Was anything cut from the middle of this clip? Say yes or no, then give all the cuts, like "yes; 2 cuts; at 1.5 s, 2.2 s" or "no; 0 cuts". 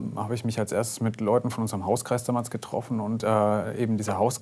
yes; 1 cut; at 3.2 s